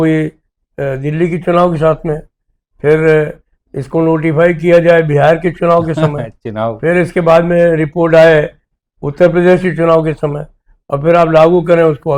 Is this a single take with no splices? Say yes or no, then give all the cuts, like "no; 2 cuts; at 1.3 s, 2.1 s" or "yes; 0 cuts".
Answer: yes; 0 cuts